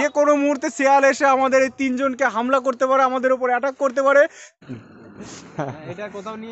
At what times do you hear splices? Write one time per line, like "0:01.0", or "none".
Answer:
0:04.7